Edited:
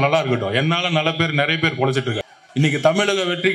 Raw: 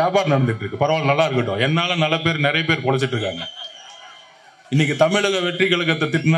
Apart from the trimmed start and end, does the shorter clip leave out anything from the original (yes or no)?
yes